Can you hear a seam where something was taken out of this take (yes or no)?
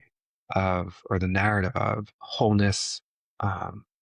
yes